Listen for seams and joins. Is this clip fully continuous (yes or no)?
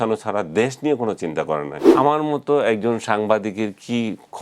no